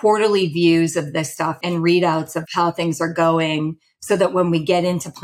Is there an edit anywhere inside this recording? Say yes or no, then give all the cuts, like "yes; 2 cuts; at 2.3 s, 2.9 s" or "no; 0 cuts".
yes; 2 cuts; at 1.6 s, 2.5 s